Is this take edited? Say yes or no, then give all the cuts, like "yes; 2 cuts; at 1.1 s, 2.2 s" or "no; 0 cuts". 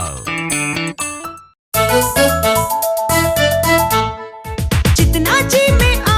yes; 1 cut; at 1.6 s